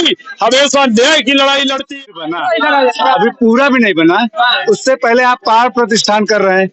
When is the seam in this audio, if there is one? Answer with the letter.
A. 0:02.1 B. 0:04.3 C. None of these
A